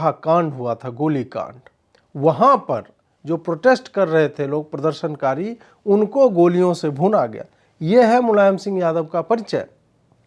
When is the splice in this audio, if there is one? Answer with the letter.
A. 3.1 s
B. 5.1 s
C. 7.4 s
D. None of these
D